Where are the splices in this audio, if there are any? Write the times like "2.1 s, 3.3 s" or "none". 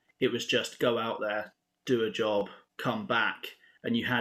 2.6 s

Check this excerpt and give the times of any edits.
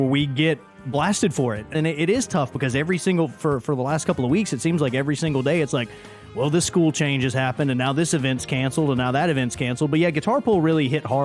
1.7 s

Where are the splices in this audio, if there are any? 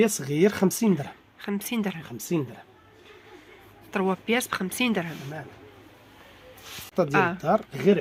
none

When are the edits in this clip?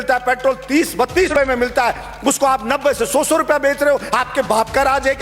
1.3 s

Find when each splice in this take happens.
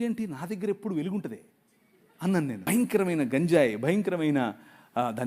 2.6 s

